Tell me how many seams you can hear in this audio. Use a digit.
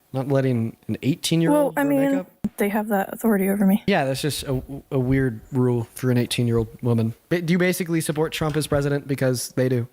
3